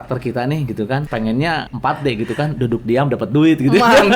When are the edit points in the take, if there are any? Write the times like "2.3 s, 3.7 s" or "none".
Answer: 1.5 s